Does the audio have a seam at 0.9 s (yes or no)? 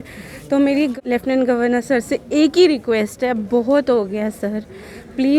yes